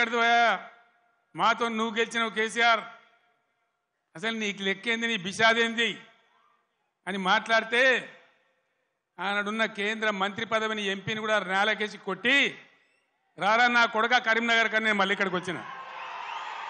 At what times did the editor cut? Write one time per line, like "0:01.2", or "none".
none